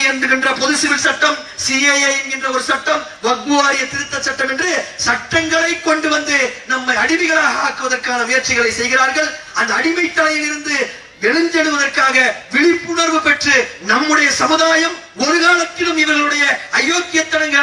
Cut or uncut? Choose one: uncut